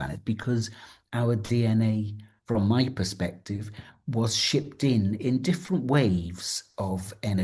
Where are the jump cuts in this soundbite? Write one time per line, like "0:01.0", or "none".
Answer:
none